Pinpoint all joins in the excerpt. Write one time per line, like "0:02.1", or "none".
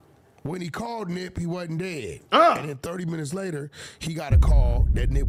none